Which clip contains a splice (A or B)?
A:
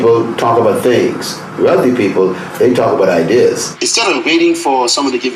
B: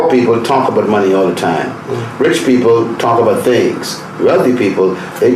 A